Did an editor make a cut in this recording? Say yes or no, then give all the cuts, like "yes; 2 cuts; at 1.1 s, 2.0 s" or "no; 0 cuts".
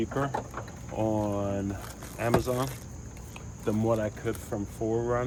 no; 0 cuts